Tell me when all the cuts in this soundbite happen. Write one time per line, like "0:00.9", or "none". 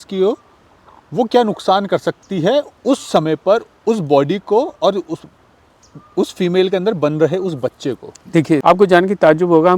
0:08.6